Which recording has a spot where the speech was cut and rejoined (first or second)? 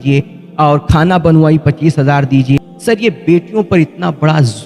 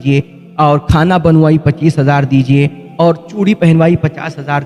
first